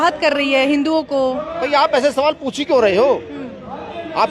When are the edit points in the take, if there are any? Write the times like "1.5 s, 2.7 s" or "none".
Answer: 1.6 s